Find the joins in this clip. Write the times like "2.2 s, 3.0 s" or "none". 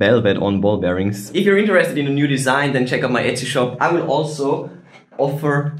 1.2 s, 3.7 s